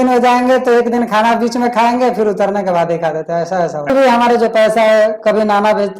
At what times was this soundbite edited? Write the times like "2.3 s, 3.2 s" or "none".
3.9 s